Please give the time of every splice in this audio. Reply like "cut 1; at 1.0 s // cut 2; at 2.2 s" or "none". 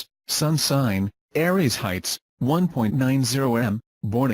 cut 1; at 2.0 s